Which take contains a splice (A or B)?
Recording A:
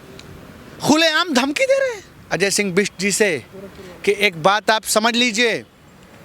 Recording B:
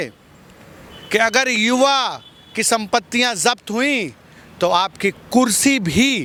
A